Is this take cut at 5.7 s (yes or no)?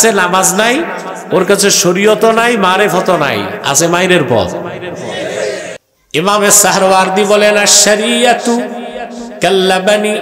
yes